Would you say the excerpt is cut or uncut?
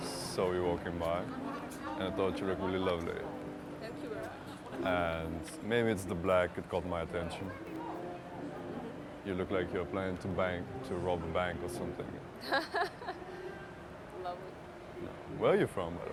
uncut